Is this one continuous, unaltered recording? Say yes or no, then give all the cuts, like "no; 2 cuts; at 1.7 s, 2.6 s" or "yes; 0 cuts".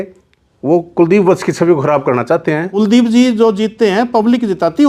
no; 1 cut; at 2.6 s